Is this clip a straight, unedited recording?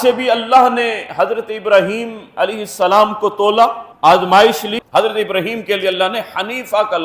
no; 1 cut; at 4.8 s

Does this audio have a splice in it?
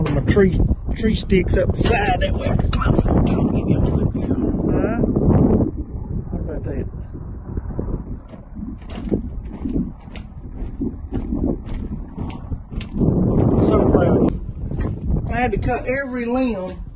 yes; 1 cut; at 14.3 s

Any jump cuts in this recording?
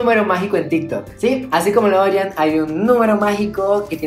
no; 0 cuts

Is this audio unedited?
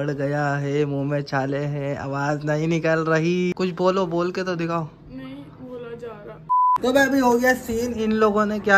no; 2 cuts; at 3.5 s, 6.5 s

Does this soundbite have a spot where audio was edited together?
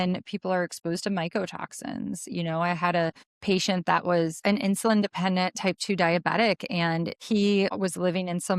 yes; 4 cuts; at 3.3 s, 4.4 s, 7.2 s, 7.7 s

